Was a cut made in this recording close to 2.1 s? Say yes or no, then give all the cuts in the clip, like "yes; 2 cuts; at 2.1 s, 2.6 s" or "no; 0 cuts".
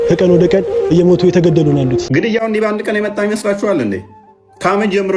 yes; 1 cut; at 2.1 s